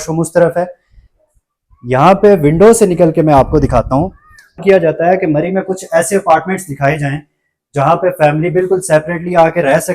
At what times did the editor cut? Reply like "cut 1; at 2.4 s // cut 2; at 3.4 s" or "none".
cut 1; at 4.6 s